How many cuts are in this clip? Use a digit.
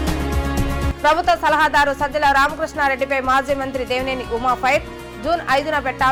0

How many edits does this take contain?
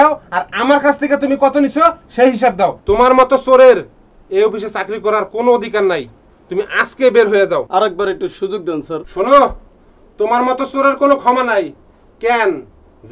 2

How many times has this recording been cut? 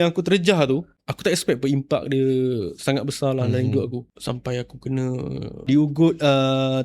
3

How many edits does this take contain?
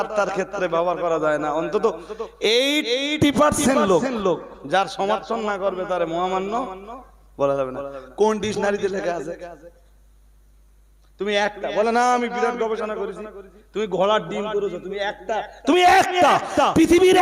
0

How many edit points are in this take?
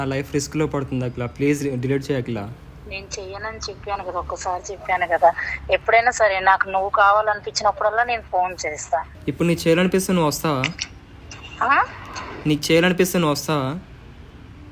1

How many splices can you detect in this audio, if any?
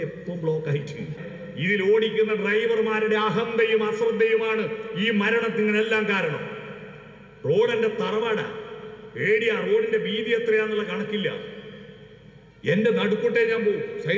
1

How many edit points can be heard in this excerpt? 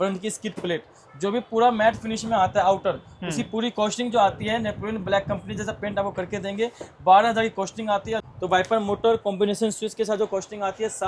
1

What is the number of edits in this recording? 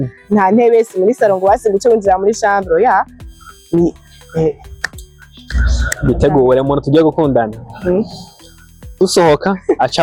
0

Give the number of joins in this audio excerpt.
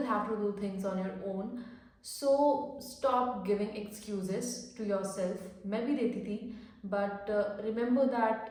0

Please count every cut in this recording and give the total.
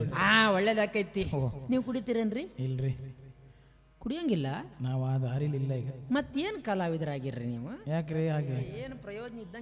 0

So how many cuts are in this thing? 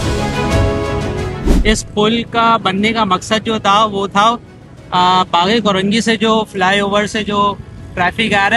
1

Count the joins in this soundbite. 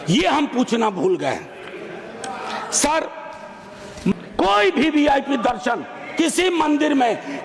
1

